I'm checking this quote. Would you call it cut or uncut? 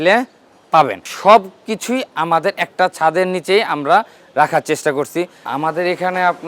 cut